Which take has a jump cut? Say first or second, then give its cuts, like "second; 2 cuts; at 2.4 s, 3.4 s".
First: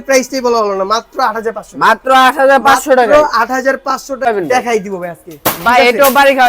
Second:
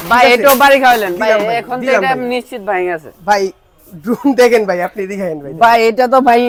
first; 1 cut; at 4.3 s